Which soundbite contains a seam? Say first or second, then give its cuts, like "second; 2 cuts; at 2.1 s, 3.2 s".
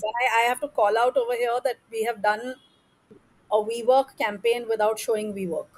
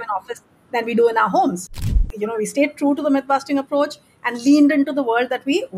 second; 1 cut; at 2.0 s